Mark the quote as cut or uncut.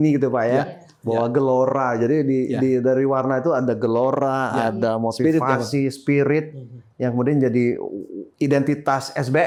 uncut